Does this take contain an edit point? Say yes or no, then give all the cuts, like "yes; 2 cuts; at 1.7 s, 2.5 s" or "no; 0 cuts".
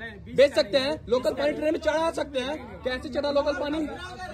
no; 0 cuts